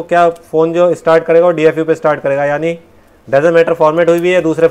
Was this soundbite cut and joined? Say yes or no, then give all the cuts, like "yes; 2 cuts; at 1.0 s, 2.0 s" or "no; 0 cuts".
no; 0 cuts